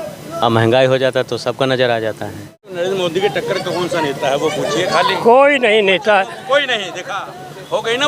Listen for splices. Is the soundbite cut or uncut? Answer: cut